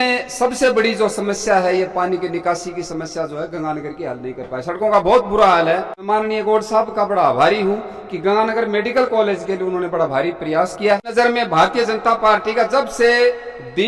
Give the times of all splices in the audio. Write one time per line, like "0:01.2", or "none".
0:06.0
0:11.1